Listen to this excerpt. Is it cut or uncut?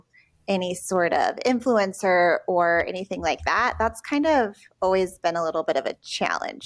uncut